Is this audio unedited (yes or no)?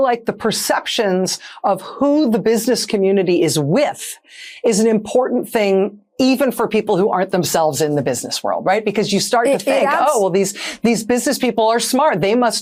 yes